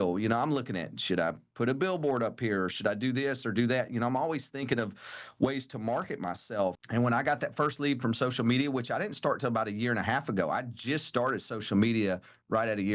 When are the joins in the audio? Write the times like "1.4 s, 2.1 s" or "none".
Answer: 6.8 s